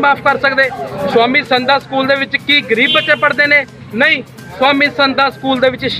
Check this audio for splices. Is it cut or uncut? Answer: uncut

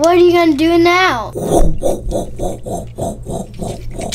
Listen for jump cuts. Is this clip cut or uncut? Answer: cut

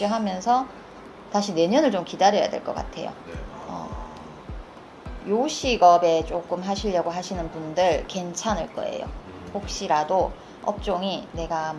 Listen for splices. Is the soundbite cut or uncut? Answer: cut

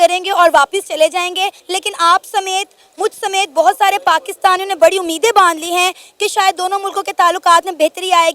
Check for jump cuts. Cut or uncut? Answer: cut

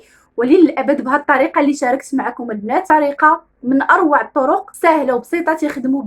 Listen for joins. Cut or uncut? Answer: cut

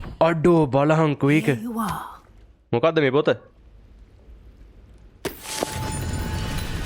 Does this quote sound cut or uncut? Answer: uncut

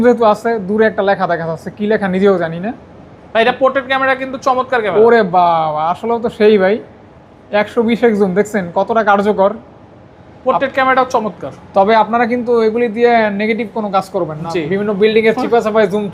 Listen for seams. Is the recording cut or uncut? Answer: uncut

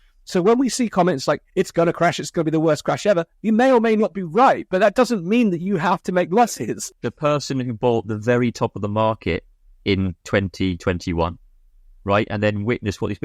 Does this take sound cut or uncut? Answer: cut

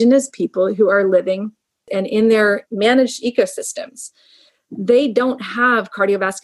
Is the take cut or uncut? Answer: cut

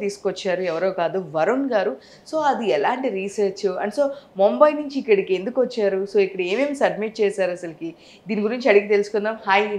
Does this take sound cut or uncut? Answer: uncut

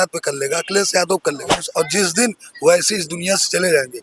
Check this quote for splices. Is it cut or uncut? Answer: cut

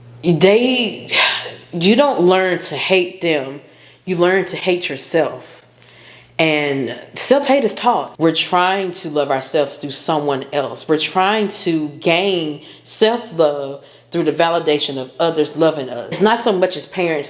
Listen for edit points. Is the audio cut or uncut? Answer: cut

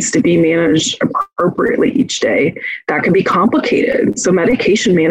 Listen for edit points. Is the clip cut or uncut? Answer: uncut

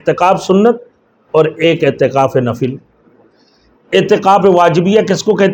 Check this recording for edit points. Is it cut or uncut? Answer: uncut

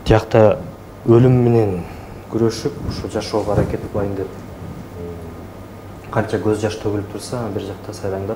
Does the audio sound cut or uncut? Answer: uncut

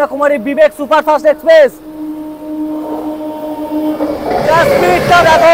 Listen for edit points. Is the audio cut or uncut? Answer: uncut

